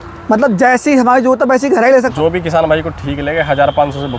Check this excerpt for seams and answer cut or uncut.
cut